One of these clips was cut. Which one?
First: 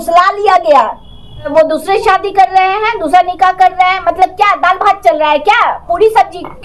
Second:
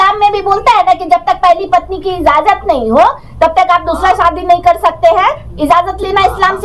first; 1 cut; at 1.5 s

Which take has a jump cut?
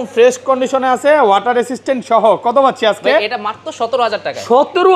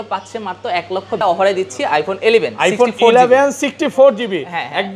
second; 1 cut; at 1.1 s

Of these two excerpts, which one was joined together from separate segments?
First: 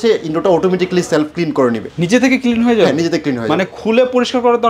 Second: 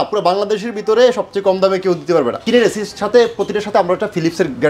second; 1 cut; at 2.4 s

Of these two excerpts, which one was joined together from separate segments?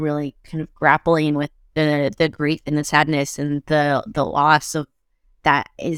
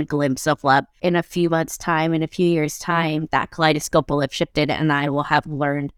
second; 1 cut; at 0.9 s

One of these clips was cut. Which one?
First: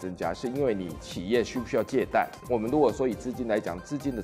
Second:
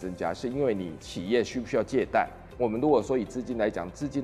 first; 1 cut; at 2.4 s

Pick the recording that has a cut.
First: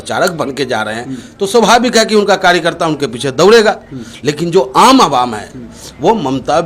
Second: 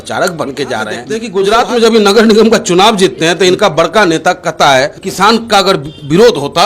second; 2 cuts; at 1.1 s, 5.0 s

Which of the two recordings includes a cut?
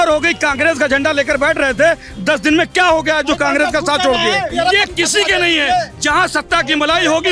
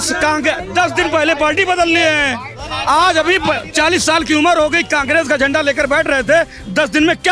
first; 1 cut; at 4.5 s

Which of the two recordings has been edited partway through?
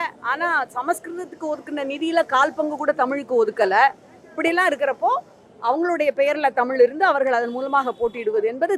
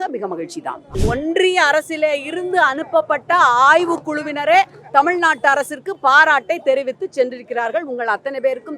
second; 1 cut; at 1.0 s

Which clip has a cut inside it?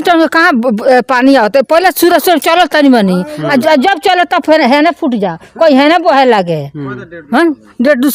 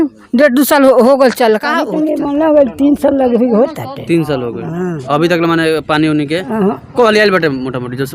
second; 1 cut; at 1.9 s

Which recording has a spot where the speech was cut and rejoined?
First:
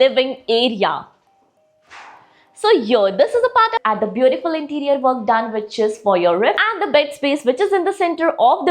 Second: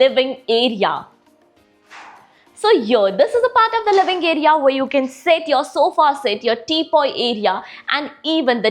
first; 2 cuts; at 3.8 s, 6.6 s

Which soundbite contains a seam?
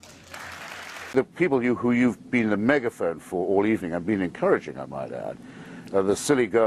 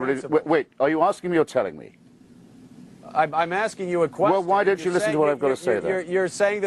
first; 1 cut; at 3.6 s

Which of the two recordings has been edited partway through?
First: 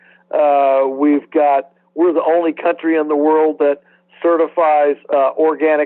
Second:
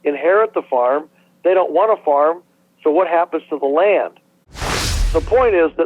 second; 1 cut; at 4.7 s

